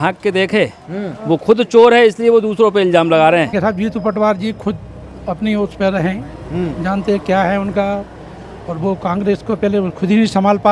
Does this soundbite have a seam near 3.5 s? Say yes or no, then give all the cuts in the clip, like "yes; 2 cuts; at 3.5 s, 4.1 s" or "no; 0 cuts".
yes; 1 cut; at 3.5 s